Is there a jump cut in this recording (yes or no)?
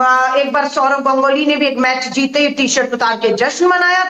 no